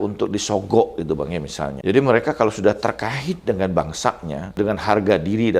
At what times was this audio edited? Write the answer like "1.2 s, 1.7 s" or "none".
1.8 s, 4.6 s